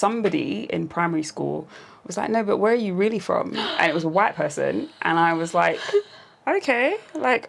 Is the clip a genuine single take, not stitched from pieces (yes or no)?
yes